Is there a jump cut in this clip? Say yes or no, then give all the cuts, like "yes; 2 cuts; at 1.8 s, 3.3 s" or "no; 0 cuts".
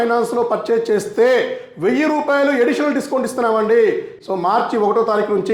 yes; 1 cut; at 4.1 s